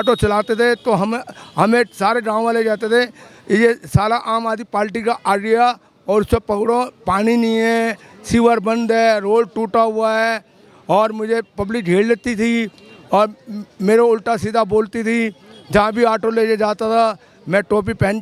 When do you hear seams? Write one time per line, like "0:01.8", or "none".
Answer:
none